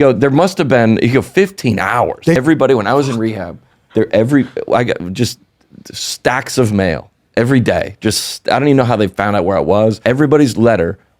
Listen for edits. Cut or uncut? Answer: cut